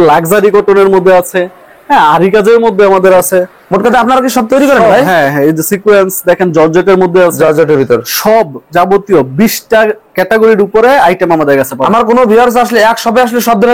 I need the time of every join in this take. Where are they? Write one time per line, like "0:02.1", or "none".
none